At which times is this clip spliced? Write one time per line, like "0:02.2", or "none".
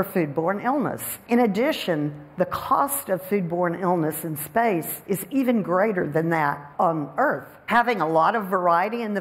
none